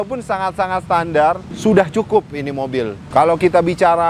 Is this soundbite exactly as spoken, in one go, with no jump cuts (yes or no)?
no